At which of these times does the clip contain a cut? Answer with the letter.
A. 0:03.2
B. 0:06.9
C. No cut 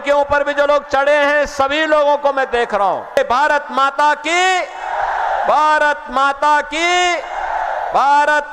A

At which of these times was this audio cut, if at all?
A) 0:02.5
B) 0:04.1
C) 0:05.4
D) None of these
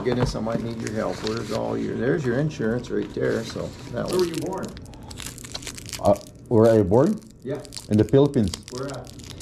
B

